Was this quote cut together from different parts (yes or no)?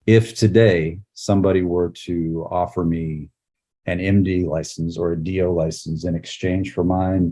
no